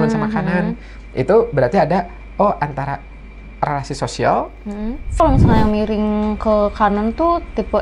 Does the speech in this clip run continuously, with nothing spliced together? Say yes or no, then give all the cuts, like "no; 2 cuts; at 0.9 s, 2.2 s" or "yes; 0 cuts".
no; 1 cut; at 5.2 s